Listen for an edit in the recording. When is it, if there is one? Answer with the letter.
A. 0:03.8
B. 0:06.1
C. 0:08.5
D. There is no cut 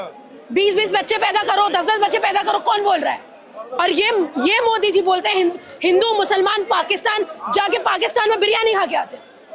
A